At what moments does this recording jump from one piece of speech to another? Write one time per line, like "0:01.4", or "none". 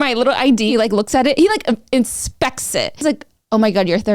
0:00.7
0:03.0